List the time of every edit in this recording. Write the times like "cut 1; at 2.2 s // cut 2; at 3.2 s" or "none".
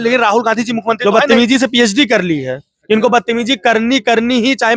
cut 1; at 1.0 s